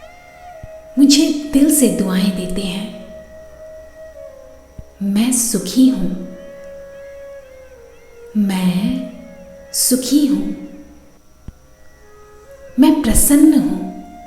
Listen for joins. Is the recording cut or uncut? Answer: cut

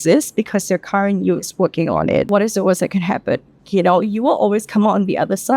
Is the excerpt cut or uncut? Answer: cut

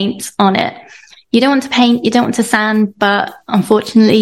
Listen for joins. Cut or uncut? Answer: uncut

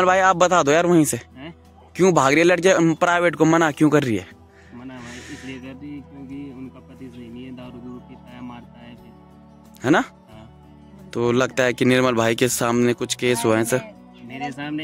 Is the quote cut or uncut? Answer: uncut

